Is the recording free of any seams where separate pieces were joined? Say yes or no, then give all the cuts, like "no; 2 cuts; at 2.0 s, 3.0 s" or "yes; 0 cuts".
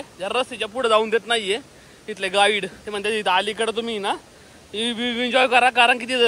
yes; 0 cuts